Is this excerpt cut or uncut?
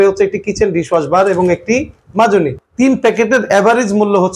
cut